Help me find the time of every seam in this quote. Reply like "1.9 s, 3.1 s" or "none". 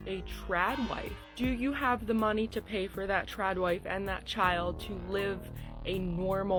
none

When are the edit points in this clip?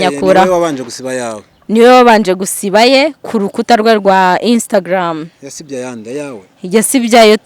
none

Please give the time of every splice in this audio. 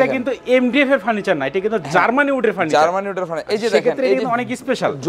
none

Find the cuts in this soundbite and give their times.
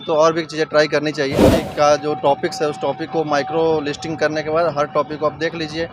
1.6 s

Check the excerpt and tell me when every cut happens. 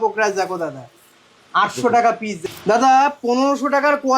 2.4 s

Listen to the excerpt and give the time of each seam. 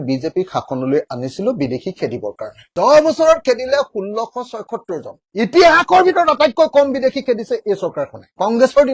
2.7 s, 5.2 s

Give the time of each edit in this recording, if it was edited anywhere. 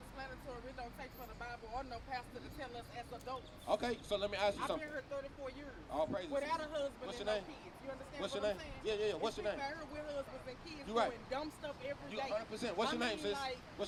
none

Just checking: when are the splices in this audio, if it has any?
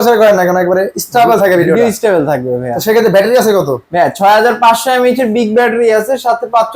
none

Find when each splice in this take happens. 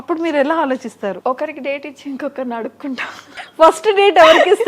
1.2 s, 3.4 s

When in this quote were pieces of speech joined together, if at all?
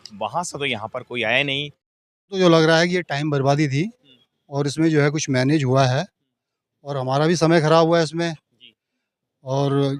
2.4 s

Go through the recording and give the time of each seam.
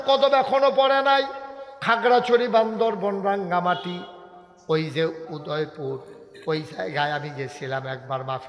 5.2 s

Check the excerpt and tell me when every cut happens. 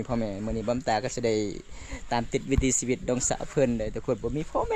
none

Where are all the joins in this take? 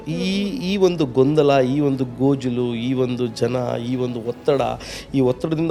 none

